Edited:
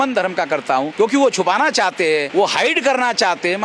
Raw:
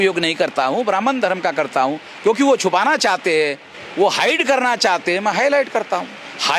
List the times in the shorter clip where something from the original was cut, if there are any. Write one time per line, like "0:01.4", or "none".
0:00.9
0:02.3